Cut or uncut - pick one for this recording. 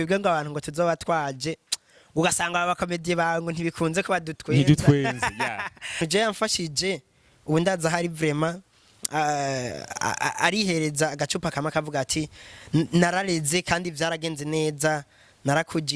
cut